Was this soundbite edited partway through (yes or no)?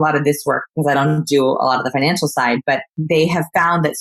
no